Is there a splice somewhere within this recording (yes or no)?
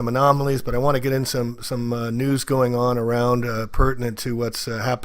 yes